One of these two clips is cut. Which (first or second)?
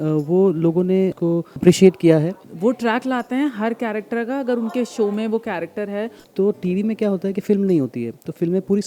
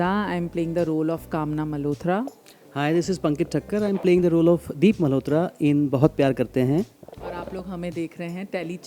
first